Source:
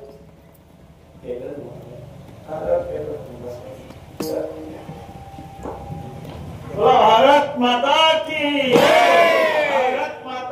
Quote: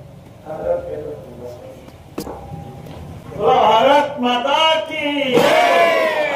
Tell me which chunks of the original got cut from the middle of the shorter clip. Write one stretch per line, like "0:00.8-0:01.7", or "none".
0:04.2-0:05.6